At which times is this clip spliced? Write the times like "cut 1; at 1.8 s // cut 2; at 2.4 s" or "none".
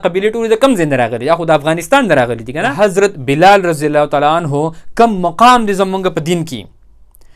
cut 1; at 2.6 s